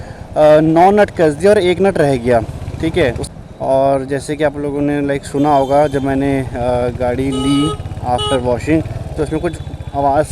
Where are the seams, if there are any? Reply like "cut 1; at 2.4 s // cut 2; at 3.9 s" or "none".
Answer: cut 1; at 3.2 s